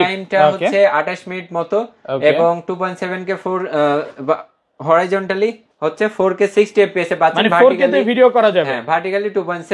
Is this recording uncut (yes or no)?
yes